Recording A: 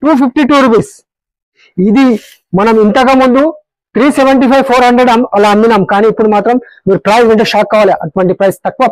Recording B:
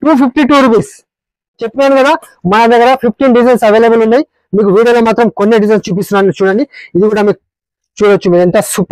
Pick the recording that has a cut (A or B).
A